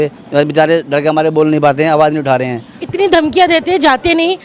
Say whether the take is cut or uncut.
cut